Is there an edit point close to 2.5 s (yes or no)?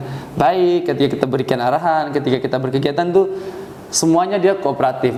no